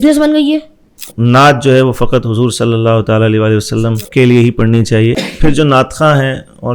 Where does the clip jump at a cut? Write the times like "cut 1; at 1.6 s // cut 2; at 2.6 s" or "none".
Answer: cut 1; at 1.0 s // cut 2; at 4.0 s // cut 3; at 5.3 s